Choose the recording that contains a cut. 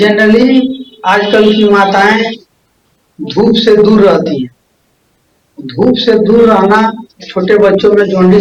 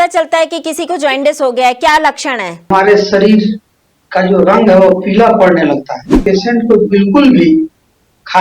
second; 2 cuts; at 2.7 s, 6.2 s

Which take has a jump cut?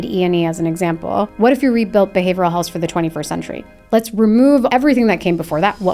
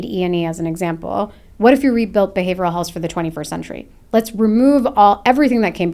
first; 2 cuts; at 1.3 s, 4.7 s

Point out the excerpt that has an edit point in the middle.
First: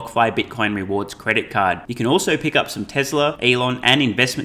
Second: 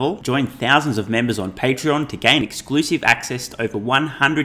first; 1 cut; at 3.4 s

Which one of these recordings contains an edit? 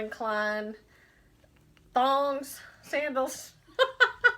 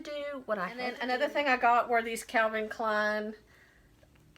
second; 1 cut; at 1.0 s

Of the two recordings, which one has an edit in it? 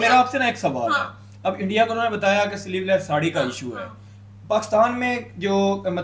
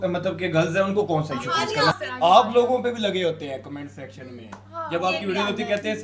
second; 1 cut; at 1.9 s

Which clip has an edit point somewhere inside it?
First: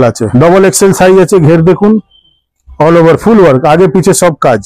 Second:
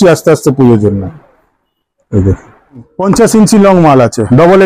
second; 1 cut; at 2.9 s

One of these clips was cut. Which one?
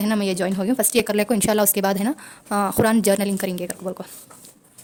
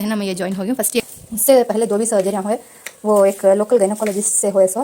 second; 1 cut; at 1.0 s

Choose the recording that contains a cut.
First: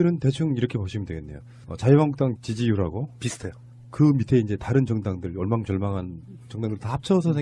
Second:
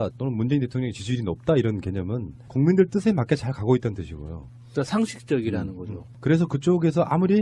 first; 1 cut; at 5.0 s

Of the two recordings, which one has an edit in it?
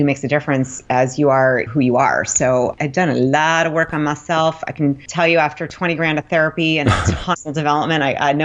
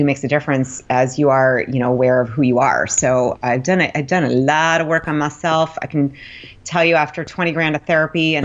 first; 3 cuts; at 1.7 s, 2.8 s, 5.1 s

